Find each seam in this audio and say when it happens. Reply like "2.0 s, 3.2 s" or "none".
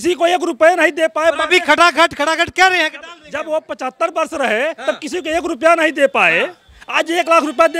none